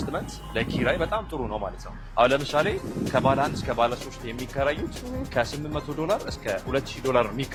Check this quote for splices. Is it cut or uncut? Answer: uncut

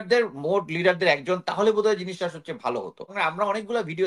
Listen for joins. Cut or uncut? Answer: cut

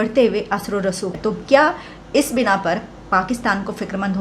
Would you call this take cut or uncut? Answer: cut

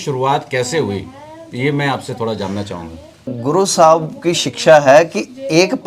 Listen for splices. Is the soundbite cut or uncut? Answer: cut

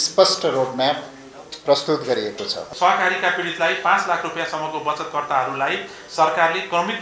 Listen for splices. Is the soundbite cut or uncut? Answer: cut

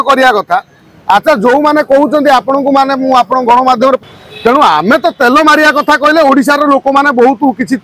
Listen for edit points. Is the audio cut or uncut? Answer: cut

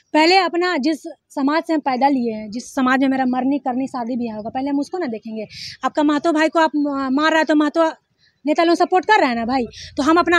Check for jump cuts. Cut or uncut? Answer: uncut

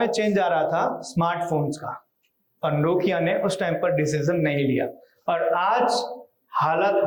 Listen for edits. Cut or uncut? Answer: uncut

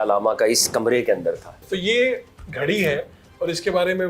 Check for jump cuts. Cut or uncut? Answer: cut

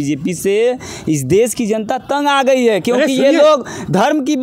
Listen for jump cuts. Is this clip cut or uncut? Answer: uncut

